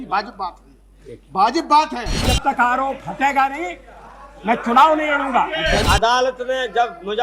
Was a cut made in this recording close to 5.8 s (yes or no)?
yes